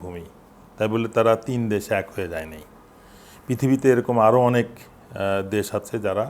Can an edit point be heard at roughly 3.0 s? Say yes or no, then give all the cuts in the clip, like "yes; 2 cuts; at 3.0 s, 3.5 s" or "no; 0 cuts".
no; 0 cuts